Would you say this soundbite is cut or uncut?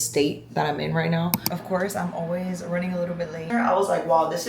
cut